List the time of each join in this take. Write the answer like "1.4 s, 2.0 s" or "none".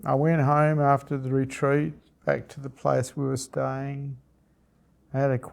none